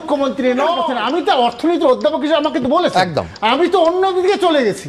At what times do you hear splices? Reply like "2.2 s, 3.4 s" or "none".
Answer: 0.9 s

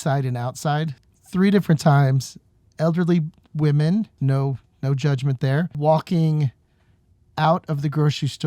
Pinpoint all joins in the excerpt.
1.0 s, 4.2 s, 5.7 s

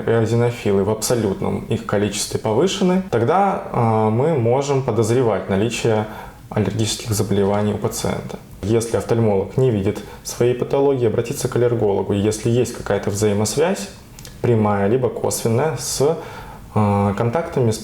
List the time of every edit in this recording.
8.6 s

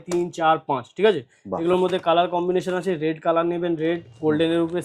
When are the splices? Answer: none

